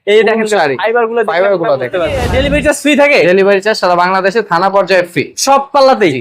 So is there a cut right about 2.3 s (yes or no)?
yes